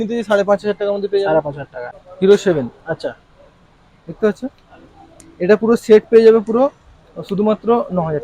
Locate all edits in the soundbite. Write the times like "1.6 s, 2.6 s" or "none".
1.7 s